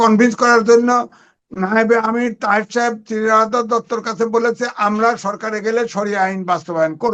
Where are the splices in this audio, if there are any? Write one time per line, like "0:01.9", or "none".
none